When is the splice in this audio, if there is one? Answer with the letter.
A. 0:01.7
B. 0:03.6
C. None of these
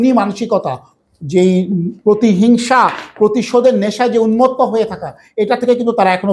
C